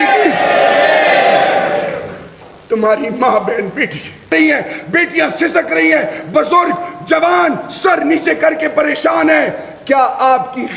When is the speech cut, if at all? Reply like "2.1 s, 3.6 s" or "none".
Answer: 4.2 s